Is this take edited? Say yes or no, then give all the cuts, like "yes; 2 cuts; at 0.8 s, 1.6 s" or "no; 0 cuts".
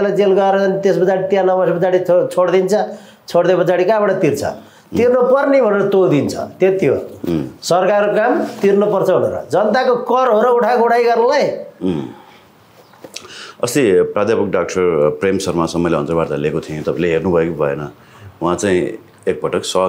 no; 0 cuts